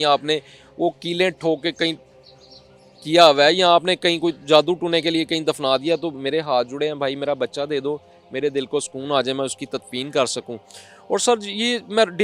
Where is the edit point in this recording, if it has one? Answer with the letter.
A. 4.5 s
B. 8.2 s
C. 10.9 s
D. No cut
D